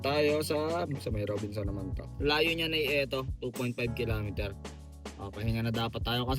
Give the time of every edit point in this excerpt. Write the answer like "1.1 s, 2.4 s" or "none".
2.1 s